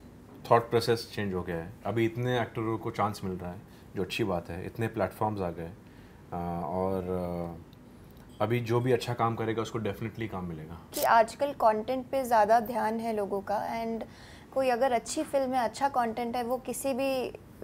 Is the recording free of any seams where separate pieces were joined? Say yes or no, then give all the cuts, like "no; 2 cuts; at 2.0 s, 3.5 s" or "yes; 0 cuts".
no; 1 cut; at 10.9 s